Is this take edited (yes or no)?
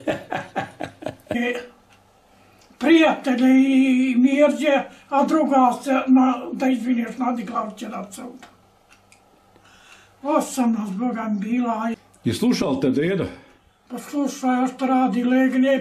yes